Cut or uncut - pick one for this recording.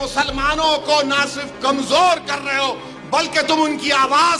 uncut